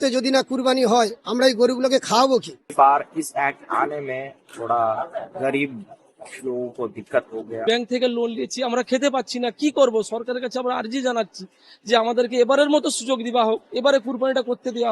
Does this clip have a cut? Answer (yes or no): yes